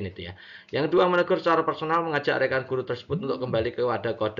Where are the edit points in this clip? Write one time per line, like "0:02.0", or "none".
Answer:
0:01.1